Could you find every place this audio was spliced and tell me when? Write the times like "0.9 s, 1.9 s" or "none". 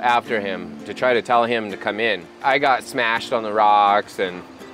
2.3 s